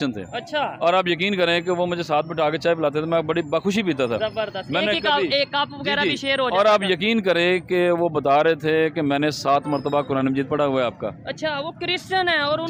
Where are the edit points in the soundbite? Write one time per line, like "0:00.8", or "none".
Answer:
none